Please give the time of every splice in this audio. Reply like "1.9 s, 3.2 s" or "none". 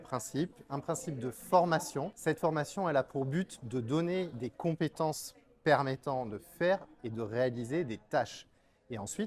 2.1 s